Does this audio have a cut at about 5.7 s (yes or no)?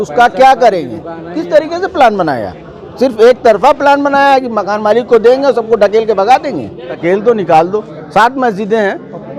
no